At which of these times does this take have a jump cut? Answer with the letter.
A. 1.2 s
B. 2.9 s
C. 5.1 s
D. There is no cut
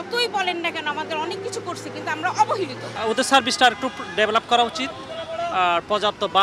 B